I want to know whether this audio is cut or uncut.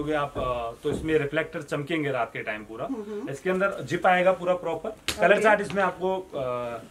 uncut